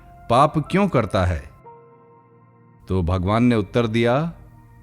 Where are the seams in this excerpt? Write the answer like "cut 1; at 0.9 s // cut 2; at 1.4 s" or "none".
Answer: cut 1; at 1.5 s // cut 2; at 2.8 s